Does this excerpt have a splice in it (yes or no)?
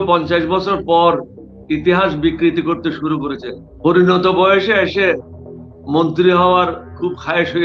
no